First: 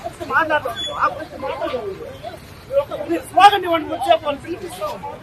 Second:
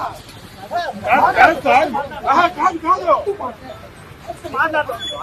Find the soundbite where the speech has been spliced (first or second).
first